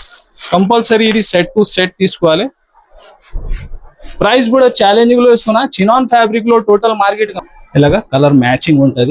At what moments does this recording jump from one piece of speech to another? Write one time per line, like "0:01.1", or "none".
0:07.3